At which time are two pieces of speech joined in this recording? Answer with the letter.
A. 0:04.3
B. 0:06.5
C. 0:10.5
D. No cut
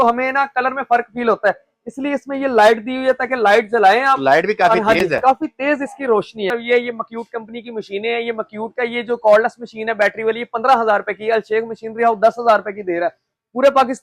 B